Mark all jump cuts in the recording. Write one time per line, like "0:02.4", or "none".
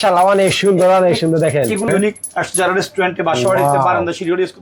0:01.9